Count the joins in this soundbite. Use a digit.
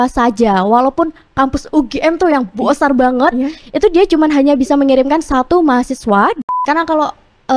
1